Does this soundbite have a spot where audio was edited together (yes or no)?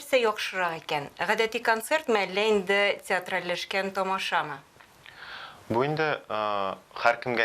no